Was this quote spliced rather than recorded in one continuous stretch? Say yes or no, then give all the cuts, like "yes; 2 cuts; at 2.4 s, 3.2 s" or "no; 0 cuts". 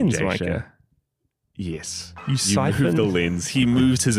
no; 0 cuts